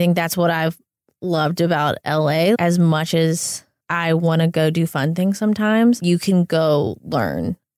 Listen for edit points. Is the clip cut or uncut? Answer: cut